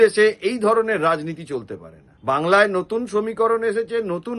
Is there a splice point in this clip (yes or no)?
no